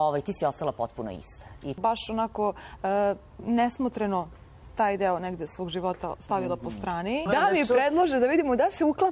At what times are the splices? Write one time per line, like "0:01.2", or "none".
0:01.8
0:07.3